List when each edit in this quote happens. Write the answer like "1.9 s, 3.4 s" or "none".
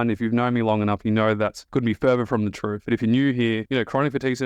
1.6 s, 2.7 s